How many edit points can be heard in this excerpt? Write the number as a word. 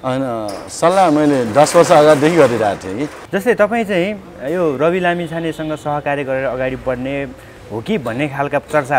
one